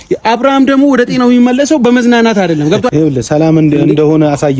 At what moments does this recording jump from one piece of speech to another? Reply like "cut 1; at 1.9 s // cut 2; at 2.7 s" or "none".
cut 1; at 2.9 s